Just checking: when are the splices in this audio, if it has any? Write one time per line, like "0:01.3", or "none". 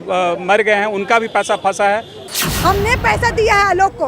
0:02.3